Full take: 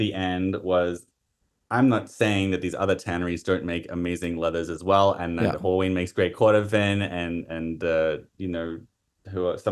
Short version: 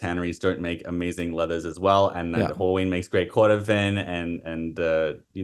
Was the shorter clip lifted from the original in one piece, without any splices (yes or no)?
yes